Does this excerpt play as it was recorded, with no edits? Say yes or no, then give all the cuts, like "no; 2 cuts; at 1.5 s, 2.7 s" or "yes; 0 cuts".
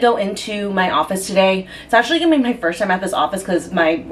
yes; 0 cuts